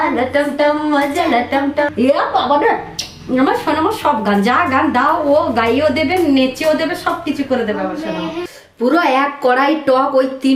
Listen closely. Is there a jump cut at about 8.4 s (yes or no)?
yes